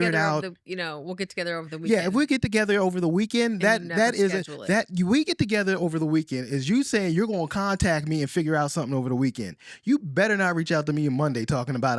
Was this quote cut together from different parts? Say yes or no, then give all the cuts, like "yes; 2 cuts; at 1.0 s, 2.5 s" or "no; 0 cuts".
no; 0 cuts